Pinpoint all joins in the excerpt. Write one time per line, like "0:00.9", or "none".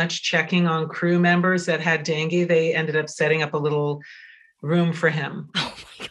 none